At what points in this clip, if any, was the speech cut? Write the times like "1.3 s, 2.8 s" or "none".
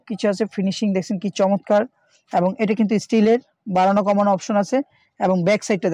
none

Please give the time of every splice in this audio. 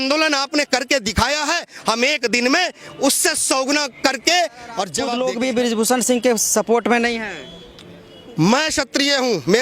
5.0 s

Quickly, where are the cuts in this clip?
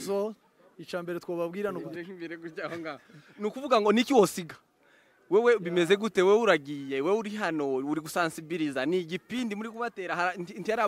1.8 s

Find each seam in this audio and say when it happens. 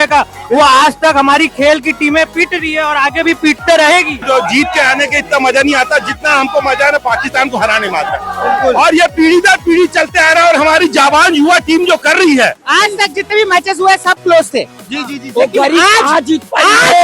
4.2 s, 12.6 s

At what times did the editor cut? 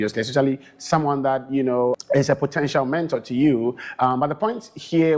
none

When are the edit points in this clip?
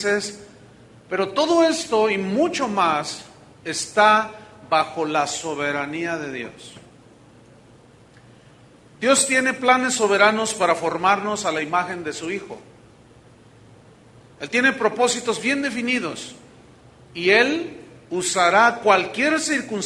16.3 s

